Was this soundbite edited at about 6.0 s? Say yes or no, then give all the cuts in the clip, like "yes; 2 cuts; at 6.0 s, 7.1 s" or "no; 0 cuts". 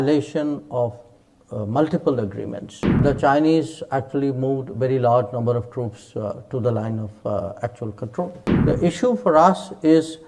no; 2 cuts; at 3.0 s, 8.5 s